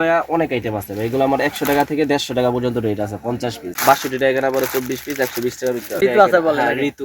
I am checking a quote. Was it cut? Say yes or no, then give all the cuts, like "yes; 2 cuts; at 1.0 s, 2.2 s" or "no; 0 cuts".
yes; 2 cuts; at 3.7 s, 6.0 s